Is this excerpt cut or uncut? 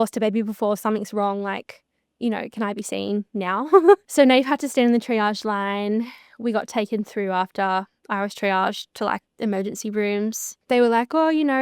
cut